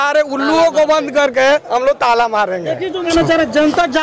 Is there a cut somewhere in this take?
yes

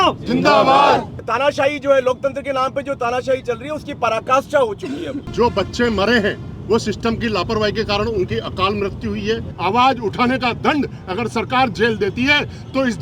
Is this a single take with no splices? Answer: no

